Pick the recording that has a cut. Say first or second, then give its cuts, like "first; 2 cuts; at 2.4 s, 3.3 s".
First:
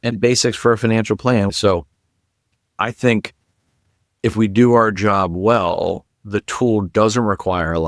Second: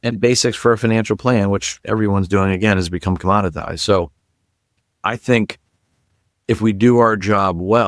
first; 1 cut; at 1.5 s